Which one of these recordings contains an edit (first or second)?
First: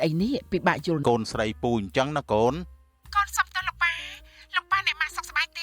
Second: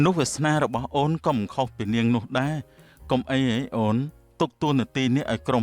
first